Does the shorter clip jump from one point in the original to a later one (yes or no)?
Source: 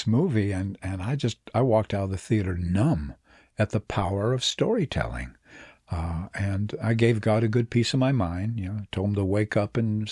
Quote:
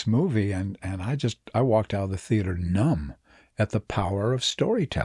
no